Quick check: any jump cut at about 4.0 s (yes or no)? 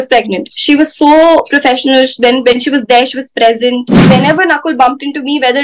yes